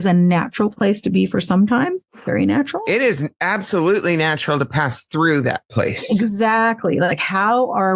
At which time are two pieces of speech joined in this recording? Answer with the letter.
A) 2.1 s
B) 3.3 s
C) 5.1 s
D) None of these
A